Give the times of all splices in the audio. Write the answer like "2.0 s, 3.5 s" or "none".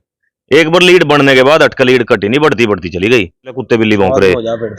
3.6 s